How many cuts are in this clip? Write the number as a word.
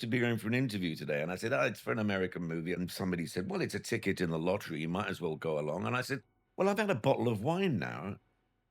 one